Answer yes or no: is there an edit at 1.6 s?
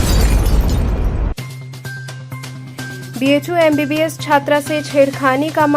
yes